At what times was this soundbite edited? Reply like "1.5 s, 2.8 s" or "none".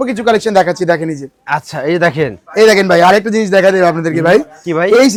none